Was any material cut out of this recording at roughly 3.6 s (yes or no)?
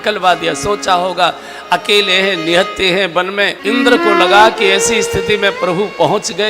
yes